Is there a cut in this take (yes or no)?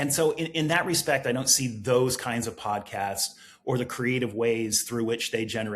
no